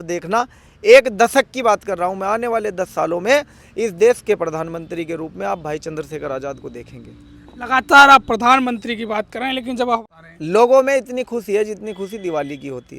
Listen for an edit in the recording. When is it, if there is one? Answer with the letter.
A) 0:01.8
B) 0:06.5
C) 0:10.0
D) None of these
C